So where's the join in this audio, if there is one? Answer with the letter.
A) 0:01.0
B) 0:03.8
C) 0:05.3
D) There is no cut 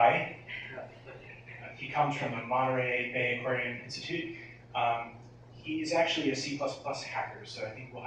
B